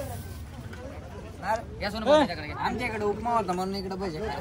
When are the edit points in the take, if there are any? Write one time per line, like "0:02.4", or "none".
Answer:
none